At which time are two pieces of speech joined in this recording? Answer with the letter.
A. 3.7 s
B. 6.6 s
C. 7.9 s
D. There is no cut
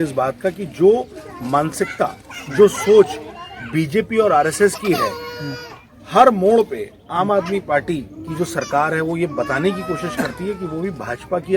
D